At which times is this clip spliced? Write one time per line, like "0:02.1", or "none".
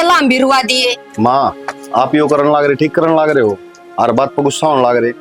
none